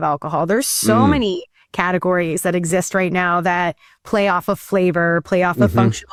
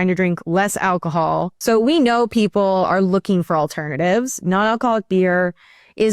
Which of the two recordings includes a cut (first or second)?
second